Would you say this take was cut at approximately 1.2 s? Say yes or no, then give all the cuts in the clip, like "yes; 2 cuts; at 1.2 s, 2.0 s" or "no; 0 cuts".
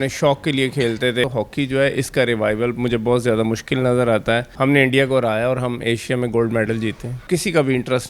yes; 3 cuts; at 1.2 s, 4.5 s, 7.2 s